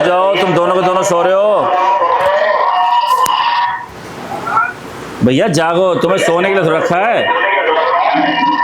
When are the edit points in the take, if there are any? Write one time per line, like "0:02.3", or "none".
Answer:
none